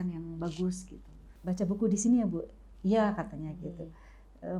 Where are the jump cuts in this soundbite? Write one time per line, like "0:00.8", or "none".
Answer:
0:01.3